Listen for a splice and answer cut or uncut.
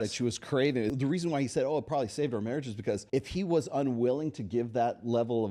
cut